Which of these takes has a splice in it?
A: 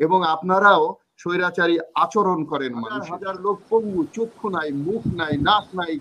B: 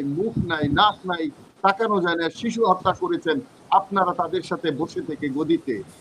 A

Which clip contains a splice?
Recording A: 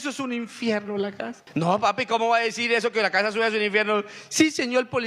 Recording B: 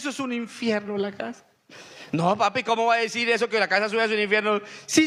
A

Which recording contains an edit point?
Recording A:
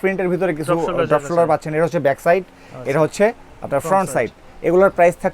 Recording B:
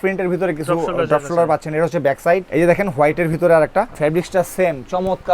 B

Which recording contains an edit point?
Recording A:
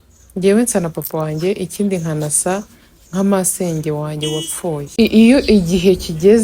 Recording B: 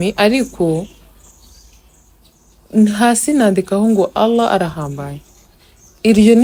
A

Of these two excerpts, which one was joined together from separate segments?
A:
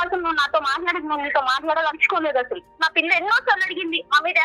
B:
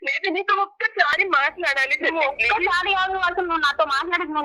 A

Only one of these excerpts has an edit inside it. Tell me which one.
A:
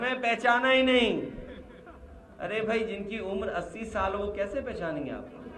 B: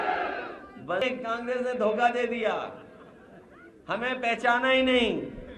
B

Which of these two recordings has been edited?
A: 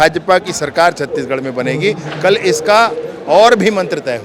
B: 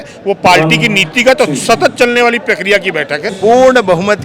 B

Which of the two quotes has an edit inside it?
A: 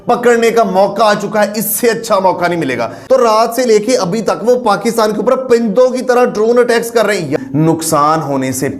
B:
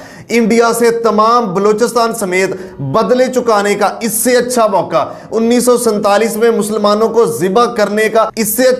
A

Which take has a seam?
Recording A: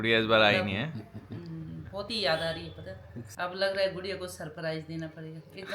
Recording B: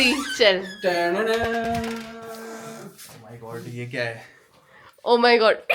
A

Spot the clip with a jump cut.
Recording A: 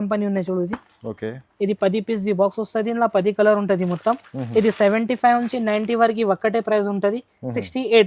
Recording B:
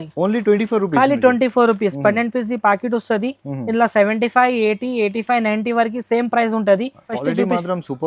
B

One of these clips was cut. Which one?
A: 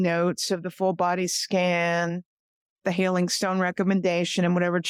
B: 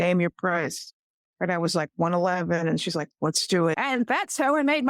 B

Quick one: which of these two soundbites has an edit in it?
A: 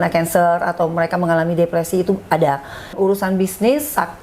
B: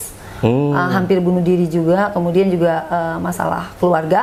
A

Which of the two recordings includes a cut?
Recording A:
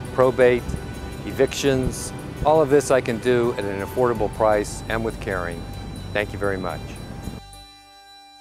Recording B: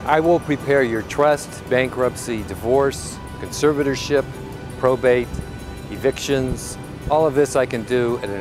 A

